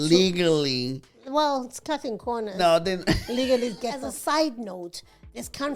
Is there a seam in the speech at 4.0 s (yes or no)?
yes